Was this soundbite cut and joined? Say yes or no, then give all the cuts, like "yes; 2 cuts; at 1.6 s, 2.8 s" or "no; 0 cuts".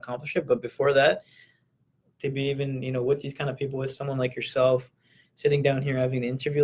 no; 0 cuts